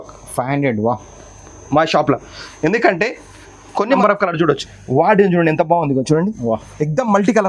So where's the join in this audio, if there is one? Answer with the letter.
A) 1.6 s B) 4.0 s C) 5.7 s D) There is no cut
B